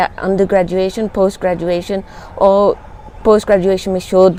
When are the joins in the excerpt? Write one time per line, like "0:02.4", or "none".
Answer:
none